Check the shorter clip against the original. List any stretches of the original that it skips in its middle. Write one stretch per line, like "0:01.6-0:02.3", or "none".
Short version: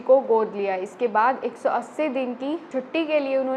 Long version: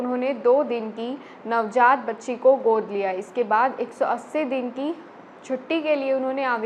0:05.0-0:05.4